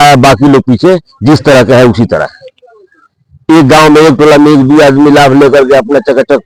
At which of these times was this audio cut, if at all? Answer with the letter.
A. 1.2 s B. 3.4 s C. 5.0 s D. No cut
D